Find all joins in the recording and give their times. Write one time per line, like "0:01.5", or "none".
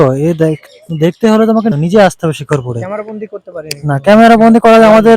0:01.7